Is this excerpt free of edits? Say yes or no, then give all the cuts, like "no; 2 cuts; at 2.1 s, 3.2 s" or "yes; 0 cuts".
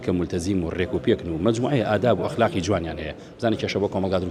yes; 0 cuts